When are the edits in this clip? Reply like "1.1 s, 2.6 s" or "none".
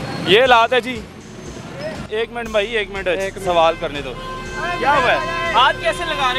2.0 s